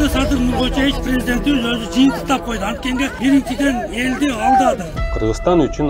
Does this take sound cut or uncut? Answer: cut